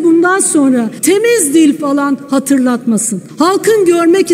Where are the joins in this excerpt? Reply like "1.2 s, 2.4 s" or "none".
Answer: 0.9 s, 3.2 s